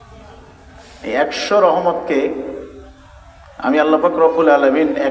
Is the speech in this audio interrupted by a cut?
no; 0 cuts

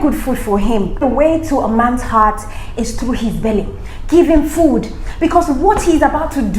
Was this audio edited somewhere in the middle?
yes; 1 cut; at 1.0 s

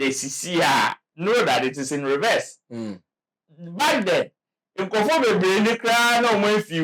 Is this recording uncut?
yes; 0 cuts

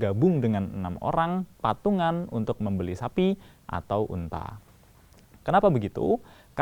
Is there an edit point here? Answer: no; 0 cuts

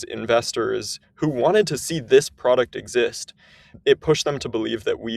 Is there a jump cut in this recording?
yes; 1 cut; at 3.7 s

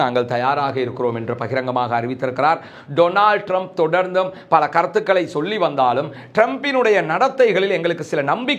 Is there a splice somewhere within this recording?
no; 0 cuts

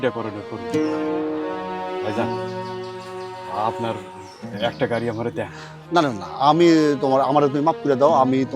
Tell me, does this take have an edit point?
no; 0 cuts

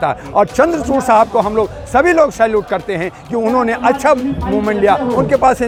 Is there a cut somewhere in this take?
no; 0 cuts

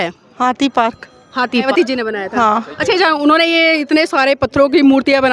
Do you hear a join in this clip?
yes; 1 cut; at 1.6 s

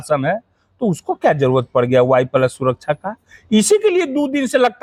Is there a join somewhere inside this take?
no; 0 cuts

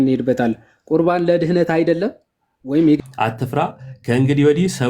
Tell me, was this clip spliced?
yes; 1 cut; at 3.0 s

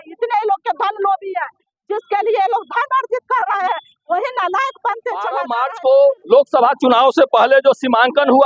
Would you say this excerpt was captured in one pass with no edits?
no; 1 cut; at 5.5 s

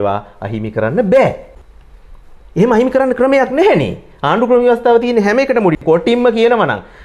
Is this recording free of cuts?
yes; 0 cuts

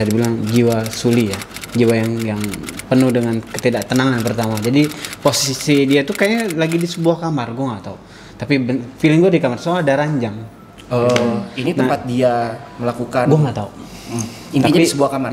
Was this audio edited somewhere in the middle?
no; 0 cuts

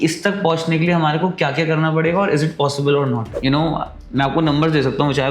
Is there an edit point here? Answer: yes; 1 cut; at 3.3 s

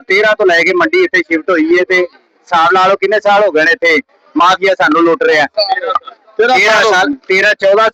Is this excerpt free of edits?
yes; 0 cuts

